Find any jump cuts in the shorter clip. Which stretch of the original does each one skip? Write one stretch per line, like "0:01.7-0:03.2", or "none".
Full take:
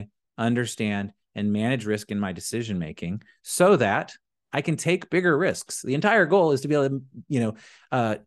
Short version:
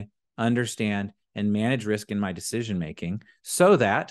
none